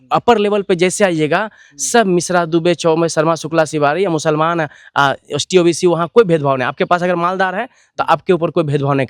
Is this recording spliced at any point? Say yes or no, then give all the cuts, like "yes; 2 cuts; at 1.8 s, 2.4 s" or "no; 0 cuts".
no; 0 cuts